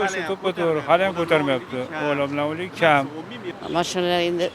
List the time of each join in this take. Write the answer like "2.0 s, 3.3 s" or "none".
3.4 s